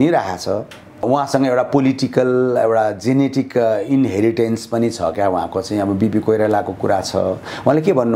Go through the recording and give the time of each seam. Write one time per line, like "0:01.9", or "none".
0:01.0

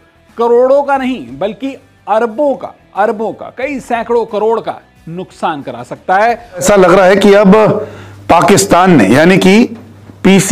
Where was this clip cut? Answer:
0:06.6

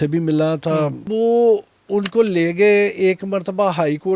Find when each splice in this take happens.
0:01.1

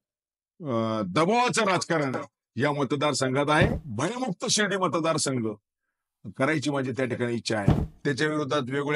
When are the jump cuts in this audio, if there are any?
0:03.8
0:07.8

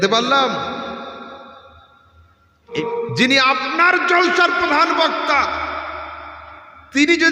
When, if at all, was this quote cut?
0:02.9

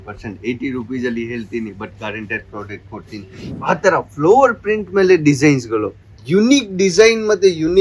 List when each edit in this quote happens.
0:03.4

